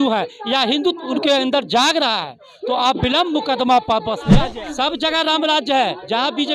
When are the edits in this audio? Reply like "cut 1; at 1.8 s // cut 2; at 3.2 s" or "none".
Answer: cut 1; at 4.4 s